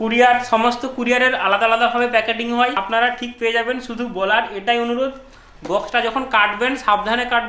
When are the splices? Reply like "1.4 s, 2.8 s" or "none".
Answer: 2.8 s